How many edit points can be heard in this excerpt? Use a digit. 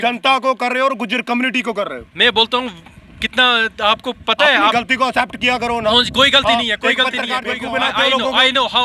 1